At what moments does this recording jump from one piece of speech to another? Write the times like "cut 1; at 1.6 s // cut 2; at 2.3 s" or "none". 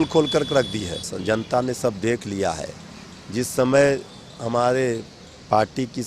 cut 1; at 1.1 s